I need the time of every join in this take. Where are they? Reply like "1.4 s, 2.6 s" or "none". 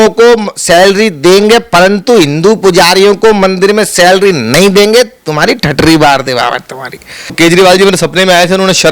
7.3 s